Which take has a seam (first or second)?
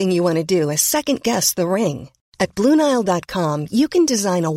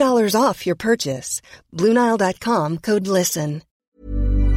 second